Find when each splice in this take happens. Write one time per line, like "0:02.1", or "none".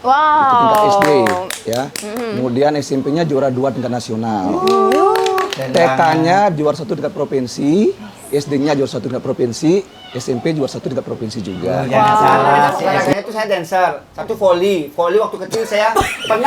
0:12.9